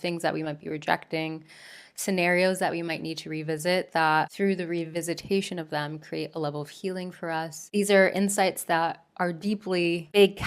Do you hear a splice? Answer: yes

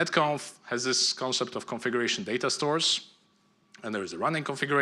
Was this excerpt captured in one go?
no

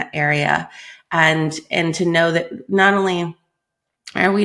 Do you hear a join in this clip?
no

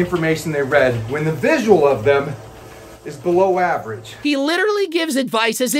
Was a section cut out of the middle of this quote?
yes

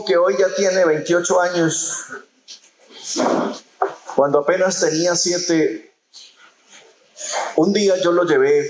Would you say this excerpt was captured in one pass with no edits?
yes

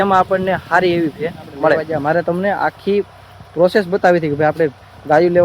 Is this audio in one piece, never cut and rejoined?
no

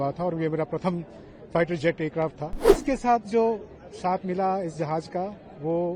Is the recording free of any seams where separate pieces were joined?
no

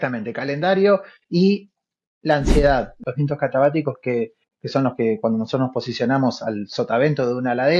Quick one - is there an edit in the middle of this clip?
yes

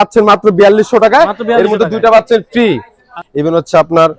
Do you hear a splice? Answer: yes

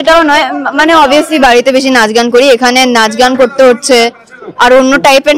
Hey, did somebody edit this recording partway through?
no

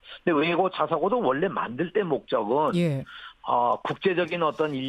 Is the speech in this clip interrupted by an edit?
yes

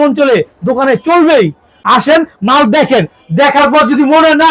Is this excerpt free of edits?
no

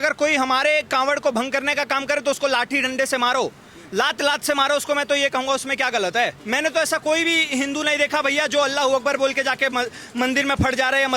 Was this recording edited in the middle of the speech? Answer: yes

